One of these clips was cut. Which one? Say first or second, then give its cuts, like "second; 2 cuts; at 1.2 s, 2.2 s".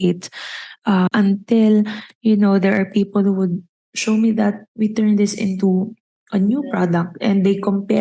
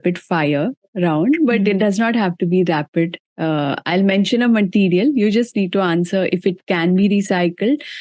first; 1 cut; at 1.1 s